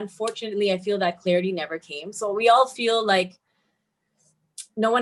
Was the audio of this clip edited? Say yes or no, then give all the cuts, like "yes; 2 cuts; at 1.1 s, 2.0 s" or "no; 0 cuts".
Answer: no; 0 cuts